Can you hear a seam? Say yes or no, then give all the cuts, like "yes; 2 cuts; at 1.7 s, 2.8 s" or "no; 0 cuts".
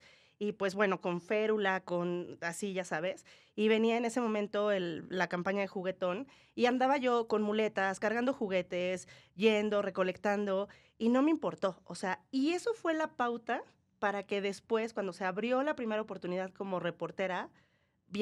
no; 0 cuts